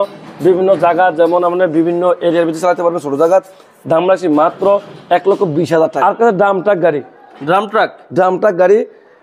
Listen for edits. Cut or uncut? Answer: cut